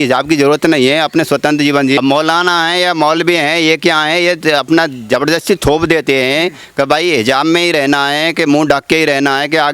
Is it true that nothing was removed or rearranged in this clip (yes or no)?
no